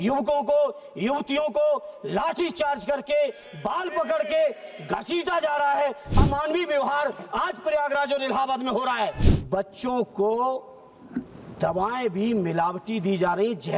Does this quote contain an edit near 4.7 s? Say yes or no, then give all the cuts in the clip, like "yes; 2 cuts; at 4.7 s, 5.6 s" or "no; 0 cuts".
no; 1 cut; at 9.3 s